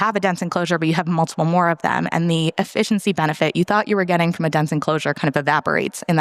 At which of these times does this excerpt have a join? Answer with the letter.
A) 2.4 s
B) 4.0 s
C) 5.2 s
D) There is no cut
D